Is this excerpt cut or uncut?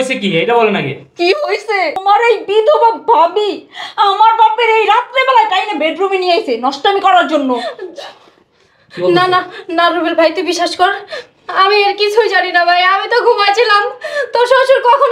cut